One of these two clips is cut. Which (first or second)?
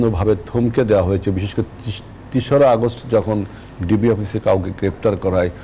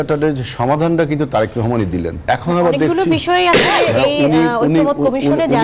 second